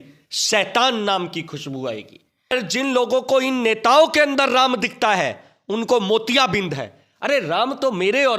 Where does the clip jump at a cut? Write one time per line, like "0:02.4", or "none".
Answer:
0:02.5